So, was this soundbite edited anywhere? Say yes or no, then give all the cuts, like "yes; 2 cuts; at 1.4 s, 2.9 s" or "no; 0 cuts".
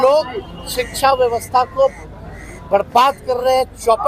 no; 0 cuts